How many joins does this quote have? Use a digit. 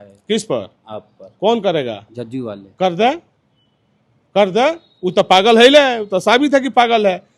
0